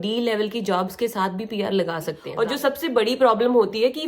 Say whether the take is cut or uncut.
cut